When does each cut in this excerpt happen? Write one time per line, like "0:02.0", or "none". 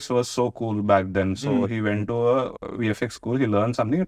0:02.6